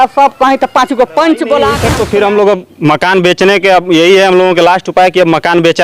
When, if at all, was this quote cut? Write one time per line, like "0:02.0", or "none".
0:01.8